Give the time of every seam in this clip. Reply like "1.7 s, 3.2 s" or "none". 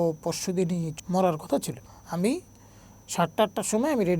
0.9 s, 1.7 s